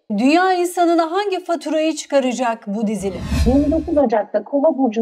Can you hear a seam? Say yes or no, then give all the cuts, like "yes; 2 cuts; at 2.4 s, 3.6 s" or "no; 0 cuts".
yes; 1 cut; at 3.4 s